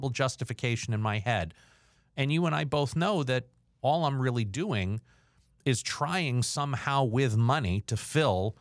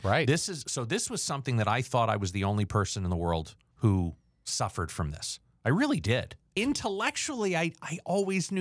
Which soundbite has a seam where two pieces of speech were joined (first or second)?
second